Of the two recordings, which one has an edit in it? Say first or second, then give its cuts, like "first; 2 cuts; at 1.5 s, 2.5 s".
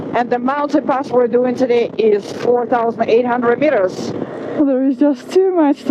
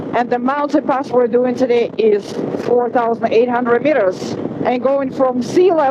first; 2 cuts; at 2.3 s, 4.2 s